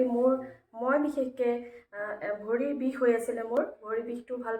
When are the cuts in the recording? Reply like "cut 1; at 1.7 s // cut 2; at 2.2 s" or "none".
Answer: none